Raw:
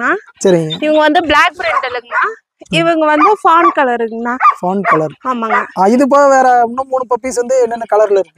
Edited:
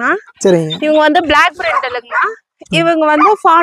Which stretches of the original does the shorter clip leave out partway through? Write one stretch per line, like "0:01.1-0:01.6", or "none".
none